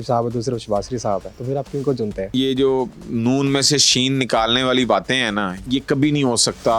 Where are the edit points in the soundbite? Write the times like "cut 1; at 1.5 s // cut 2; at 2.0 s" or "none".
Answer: cut 1; at 1.3 s // cut 2; at 2.3 s // cut 3; at 5.5 s